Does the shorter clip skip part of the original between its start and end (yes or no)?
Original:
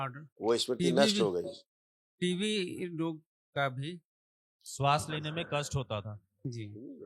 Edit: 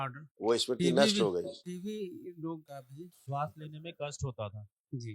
yes